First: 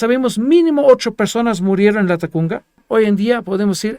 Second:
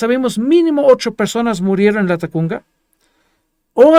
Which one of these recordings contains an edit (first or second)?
first